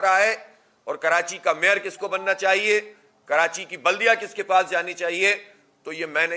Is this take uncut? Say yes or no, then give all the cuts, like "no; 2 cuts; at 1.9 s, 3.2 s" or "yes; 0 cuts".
yes; 0 cuts